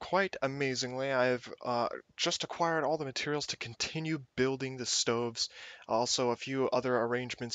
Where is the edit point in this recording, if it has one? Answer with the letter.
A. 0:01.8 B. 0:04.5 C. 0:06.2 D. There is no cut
C